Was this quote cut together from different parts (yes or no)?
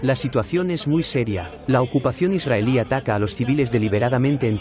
no